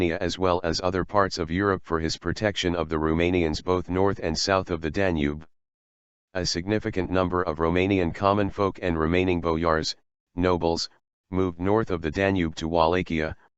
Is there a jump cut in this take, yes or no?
no